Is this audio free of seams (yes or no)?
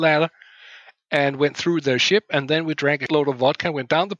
no